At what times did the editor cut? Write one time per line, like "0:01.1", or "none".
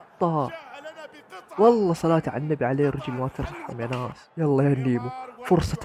0:04.2